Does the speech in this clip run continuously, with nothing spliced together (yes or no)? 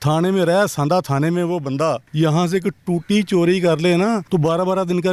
no